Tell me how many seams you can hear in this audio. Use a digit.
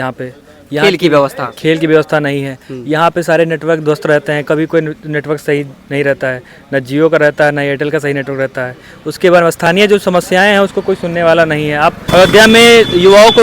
1